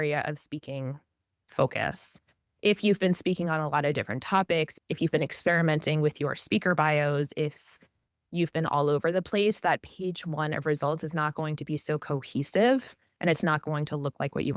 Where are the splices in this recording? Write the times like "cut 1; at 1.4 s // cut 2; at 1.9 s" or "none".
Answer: cut 1; at 4.8 s